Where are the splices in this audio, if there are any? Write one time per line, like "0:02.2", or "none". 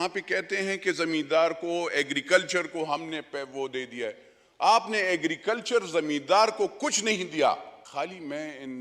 0:07.8